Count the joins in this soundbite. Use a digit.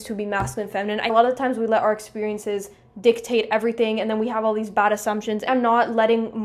2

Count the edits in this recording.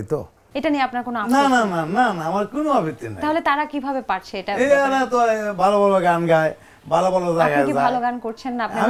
0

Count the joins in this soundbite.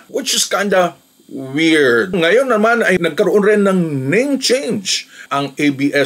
2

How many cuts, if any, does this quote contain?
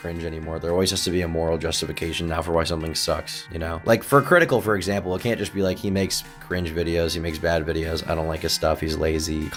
0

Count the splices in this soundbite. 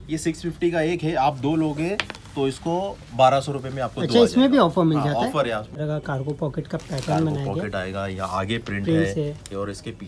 1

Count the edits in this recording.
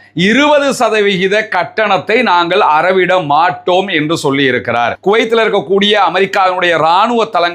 1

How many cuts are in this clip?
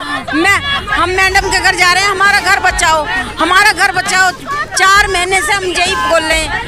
0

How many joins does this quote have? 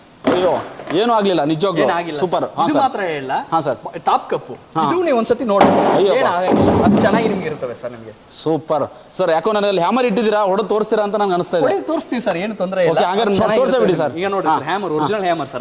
0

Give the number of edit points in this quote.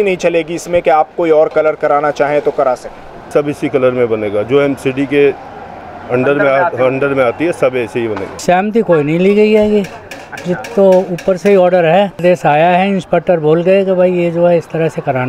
3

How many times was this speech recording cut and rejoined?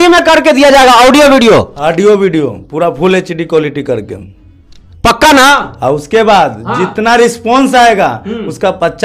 0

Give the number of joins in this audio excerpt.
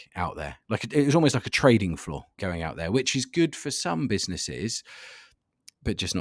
0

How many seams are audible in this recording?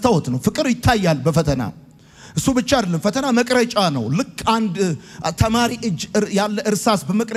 0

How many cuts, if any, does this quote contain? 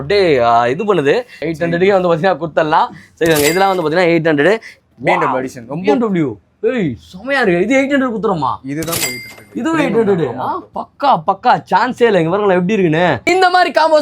3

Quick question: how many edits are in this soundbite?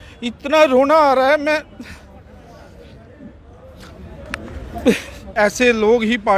1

